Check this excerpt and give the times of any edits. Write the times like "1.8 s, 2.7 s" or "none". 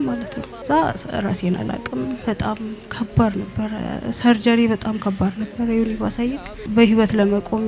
none